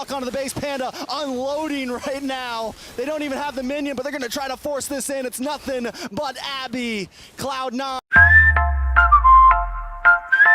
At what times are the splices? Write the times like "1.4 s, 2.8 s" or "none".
8.0 s